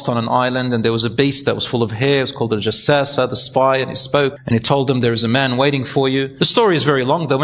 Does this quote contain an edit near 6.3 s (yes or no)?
yes